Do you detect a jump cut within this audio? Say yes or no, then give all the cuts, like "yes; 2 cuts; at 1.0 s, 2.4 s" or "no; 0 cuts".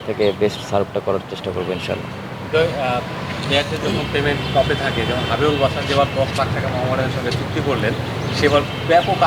no; 0 cuts